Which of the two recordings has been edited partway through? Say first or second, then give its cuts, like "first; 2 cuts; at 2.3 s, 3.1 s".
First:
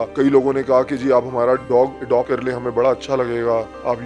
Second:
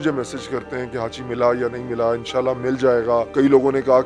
first; 1 cut; at 2.1 s